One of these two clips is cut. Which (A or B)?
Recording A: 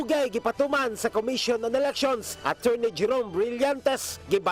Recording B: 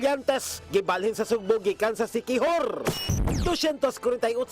B